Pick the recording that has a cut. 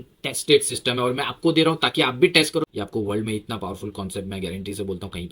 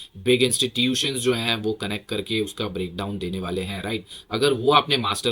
first; 1 cut; at 2.7 s

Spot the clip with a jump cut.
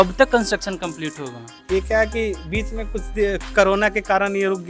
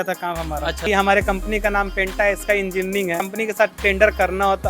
second; 2 cuts; at 0.9 s, 3.3 s

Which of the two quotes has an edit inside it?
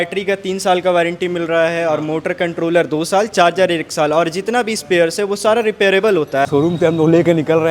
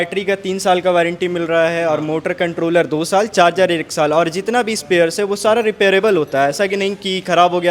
first; 1 cut; at 6.5 s

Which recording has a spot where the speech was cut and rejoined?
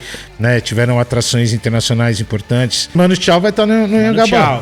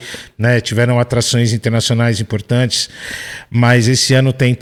first; 1 cut; at 2.9 s

